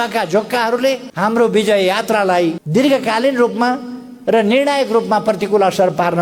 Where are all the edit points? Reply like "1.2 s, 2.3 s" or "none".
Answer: none